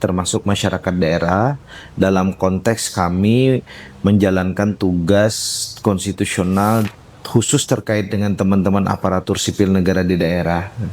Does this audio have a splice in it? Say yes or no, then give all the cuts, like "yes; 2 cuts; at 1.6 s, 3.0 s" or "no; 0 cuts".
yes; 1 cut; at 6.9 s